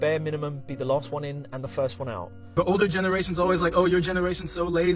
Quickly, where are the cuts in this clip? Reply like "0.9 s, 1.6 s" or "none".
2.4 s